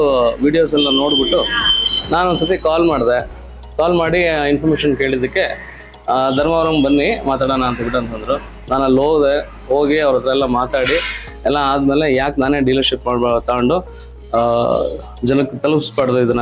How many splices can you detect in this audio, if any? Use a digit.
0